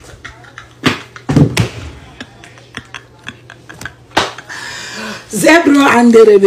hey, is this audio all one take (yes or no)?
yes